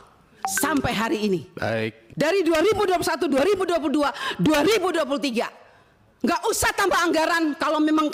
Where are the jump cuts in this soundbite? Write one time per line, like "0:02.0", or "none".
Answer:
0:02.0